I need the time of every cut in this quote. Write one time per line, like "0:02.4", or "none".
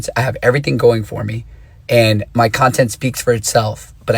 none